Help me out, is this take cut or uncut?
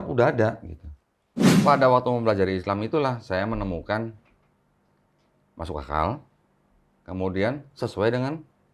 cut